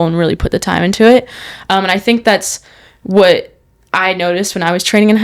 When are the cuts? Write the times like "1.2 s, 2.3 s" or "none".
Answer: none